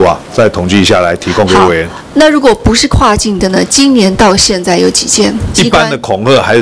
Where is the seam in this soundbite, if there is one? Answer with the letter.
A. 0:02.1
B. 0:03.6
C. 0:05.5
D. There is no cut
C